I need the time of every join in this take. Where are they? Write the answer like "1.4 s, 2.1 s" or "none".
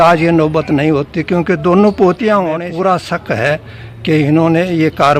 2.5 s